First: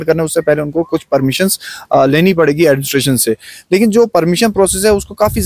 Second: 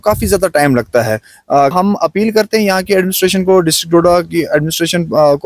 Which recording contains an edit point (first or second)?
second